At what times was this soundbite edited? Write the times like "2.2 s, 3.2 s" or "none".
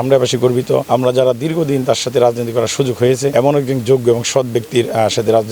0.9 s, 3.3 s